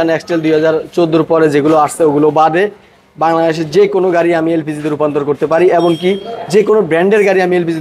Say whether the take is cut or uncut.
uncut